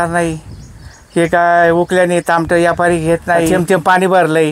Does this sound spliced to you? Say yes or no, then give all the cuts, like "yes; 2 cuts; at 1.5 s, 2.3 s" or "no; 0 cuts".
yes; 1 cut; at 3.5 s